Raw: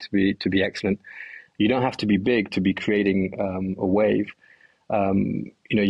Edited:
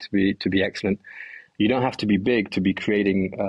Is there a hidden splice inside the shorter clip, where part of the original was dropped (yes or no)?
no